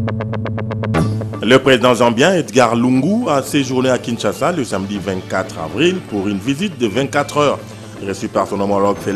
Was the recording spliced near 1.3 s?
yes; 1 cut; at 1.3 s

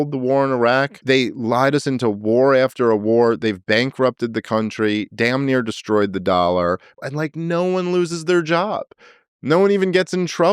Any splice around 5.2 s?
no; 2 cuts; at 0.9 s, 7.0 s

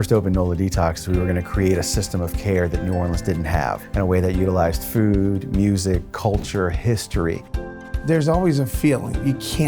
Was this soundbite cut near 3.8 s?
no; 2 cuts; at 1.0 s, 7.8 s

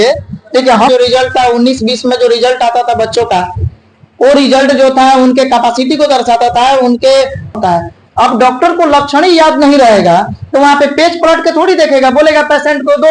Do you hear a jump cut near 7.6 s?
yes; 2 cuts; at 0.9 s, 7.6 s

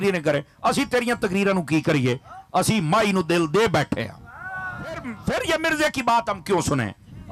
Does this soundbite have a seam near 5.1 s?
yes; 1 cut; at 5.1 s

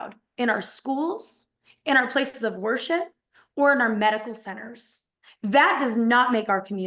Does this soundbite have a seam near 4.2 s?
no; 0 cuts

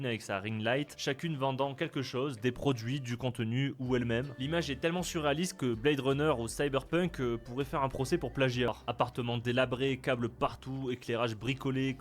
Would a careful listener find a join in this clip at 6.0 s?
no; 1 cut; at 8.7 s

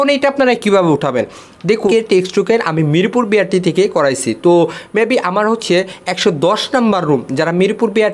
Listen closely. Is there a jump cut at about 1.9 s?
yes; 1 cut; at 1.9 s

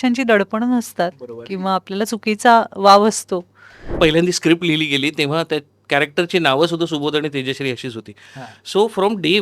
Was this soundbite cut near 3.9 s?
yes; 1 cut; at 3.9 s

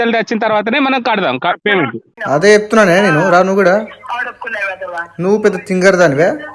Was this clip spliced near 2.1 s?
yes; 1 cut; at 2.1 s

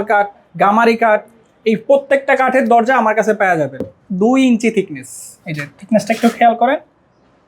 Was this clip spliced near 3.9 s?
yes; 1 cut; at 3.9 s

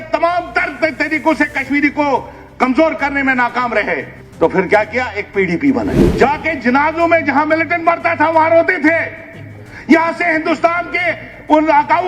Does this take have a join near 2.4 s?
no; 2 cuts; at 4.2 s, 6.0 s

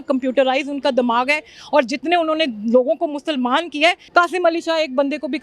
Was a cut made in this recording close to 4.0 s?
yes; 1 cut; at 4.0 s

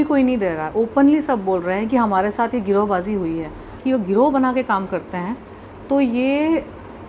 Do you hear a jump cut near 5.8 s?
no; 1 cut; at 3.8 s

